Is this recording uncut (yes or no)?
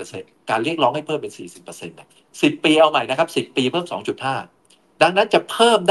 yes